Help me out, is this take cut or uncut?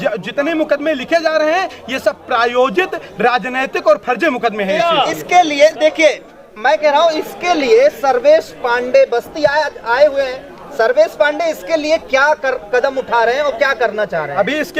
cut